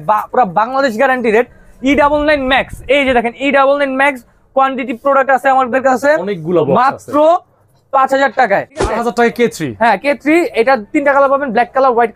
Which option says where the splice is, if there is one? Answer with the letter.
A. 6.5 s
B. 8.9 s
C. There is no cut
B